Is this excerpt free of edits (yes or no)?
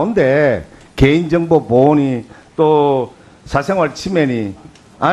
no